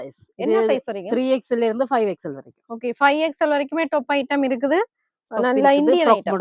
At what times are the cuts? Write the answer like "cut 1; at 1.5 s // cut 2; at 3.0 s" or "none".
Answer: none